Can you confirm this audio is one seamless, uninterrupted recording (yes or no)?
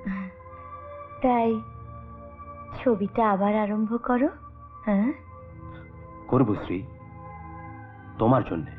yes